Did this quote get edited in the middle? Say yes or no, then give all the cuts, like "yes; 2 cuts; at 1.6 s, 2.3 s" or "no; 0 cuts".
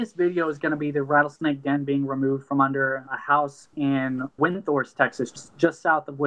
yes; 3 cuts; at 3.1 s, 4.3 s, 5.2 s